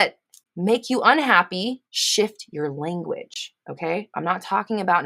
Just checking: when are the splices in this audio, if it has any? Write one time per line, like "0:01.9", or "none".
0:01.9